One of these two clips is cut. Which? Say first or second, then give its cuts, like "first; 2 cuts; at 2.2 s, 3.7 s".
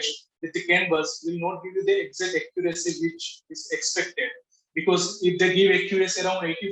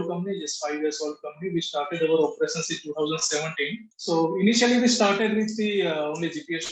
second; 1 cut; at 3.9 s